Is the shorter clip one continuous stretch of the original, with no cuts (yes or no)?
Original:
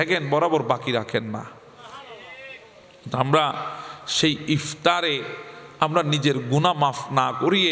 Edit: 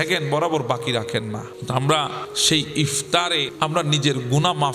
no